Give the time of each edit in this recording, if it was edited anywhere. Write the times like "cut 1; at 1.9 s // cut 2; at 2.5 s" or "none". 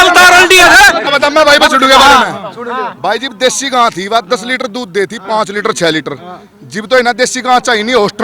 cut 1; at 1.1 s